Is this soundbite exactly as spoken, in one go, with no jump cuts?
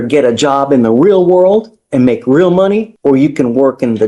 no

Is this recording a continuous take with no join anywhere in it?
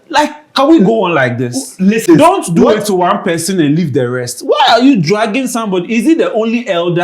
no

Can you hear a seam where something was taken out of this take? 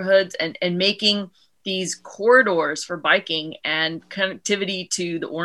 no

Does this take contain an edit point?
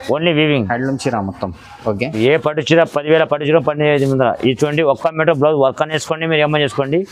yes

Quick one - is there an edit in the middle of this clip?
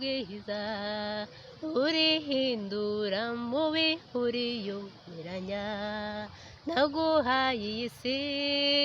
no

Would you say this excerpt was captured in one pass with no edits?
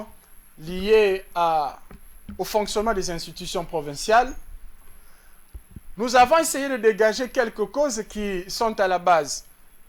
yes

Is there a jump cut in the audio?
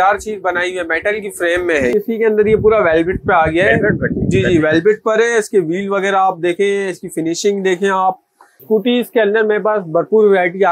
yes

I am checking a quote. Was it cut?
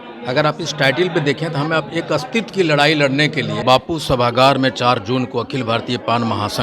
yes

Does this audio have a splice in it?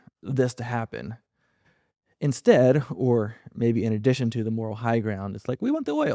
no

